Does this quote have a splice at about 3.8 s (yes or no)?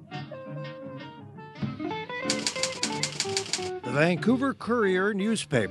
no